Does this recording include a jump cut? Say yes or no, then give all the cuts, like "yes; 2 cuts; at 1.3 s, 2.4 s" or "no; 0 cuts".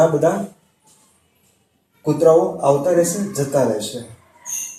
no; 0 cuts